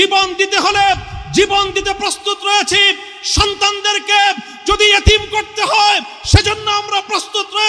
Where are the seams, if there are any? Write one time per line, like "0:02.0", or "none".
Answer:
none